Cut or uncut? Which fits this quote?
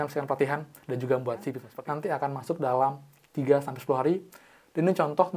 cut